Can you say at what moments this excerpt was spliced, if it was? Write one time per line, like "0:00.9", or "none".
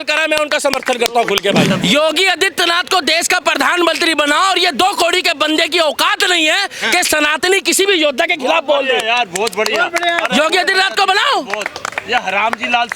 0:01.7